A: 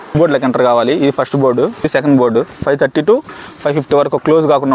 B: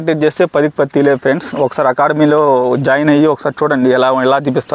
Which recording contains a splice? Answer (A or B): A